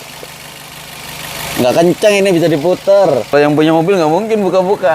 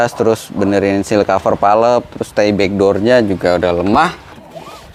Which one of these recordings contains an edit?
first; 1 cut; at 3.3 s

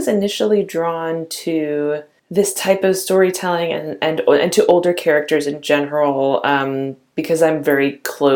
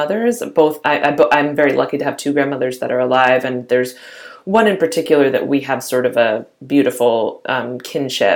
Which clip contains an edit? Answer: first; 1 cut; at 2.2 s

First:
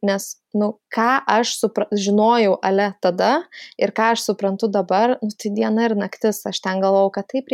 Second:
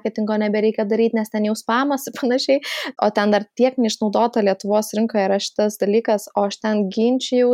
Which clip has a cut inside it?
second; 1 cut; at 2.8 s

